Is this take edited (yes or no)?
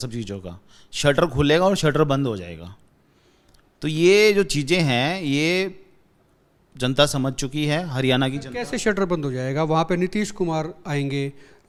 no